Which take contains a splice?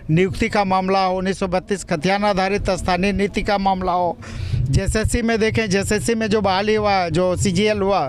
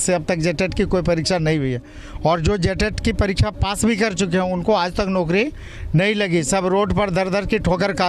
first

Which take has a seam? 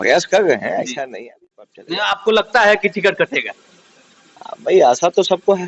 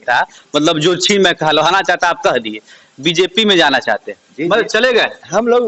first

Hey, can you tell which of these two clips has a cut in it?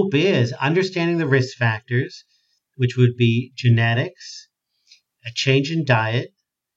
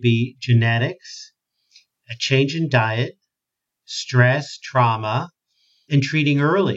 second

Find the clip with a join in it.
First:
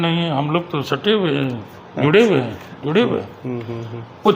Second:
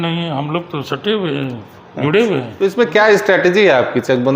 second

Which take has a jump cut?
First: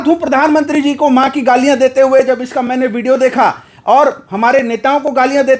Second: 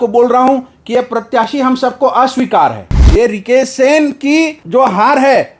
second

